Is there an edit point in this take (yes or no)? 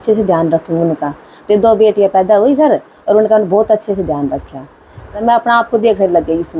yes